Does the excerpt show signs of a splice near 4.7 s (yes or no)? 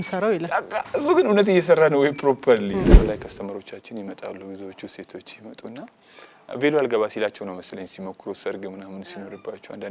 no